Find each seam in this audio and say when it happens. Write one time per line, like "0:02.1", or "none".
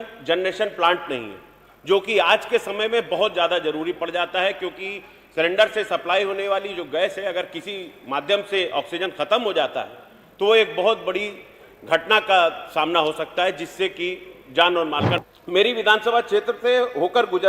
0:15.2